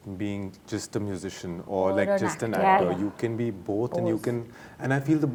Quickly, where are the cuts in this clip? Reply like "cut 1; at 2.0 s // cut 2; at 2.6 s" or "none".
none

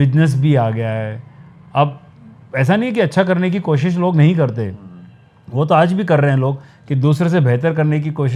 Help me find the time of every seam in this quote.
none

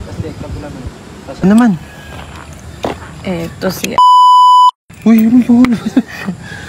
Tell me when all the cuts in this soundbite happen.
cut 1; at 1.4 s

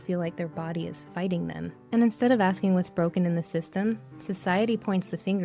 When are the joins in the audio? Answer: cut 1; at 1.7 s

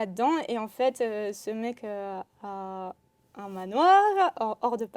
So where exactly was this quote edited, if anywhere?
none

